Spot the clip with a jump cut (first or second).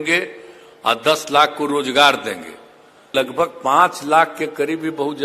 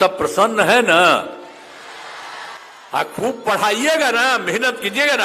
first